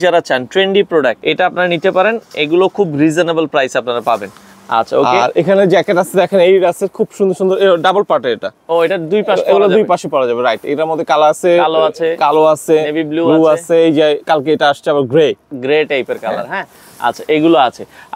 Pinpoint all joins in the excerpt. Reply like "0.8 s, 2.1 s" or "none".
none